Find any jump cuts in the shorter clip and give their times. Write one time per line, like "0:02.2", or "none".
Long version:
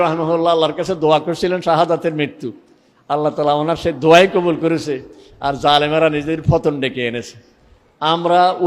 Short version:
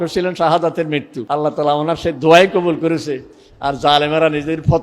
0:01.2